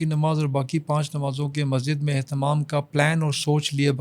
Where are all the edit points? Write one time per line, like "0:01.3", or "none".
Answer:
none